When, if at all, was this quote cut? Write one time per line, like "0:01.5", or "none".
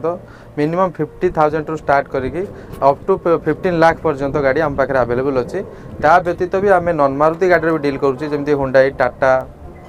none